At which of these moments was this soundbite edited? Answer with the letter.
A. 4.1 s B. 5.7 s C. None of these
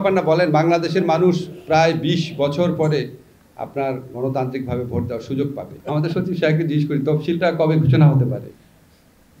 B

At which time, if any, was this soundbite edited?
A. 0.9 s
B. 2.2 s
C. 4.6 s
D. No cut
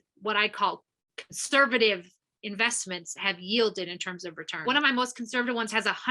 C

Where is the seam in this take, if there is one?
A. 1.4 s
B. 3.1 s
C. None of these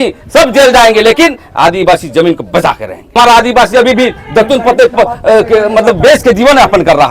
B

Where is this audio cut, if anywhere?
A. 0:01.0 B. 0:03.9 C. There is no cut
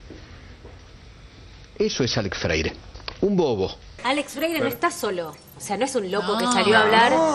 B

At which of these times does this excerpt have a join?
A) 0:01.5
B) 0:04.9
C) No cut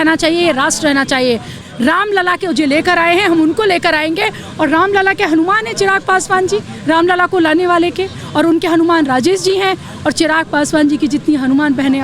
A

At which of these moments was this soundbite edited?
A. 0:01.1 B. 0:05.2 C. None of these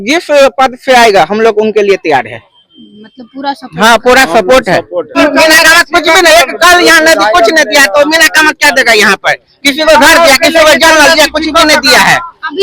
B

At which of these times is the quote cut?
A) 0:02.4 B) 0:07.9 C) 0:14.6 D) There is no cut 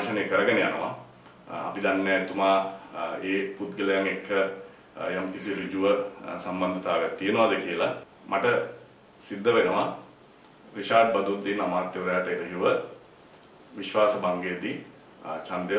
B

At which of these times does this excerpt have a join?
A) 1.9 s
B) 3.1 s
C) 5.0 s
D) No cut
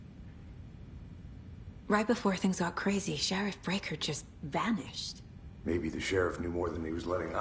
A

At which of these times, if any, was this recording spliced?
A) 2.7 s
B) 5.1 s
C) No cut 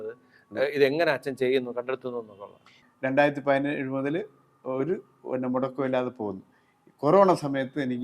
A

